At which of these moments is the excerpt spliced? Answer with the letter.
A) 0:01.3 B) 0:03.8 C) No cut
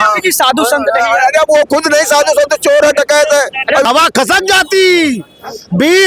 B